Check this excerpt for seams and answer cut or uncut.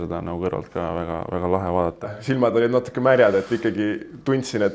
cut